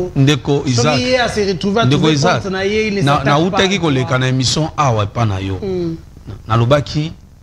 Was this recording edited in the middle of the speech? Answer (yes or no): no